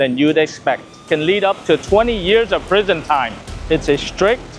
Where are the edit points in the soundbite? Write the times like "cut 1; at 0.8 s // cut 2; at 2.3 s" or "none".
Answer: cut 1; at 1.0 s // cut 2; at 3.4 s